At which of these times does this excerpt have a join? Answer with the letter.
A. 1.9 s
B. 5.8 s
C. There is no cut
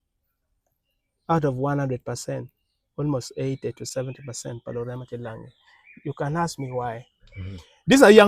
C